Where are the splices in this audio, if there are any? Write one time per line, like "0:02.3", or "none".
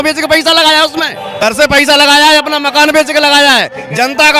0:01.4